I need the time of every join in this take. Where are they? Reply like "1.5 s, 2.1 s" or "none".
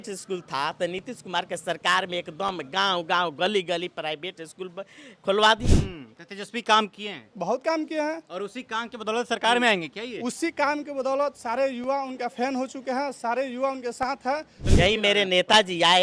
5.6 s, 14.6 s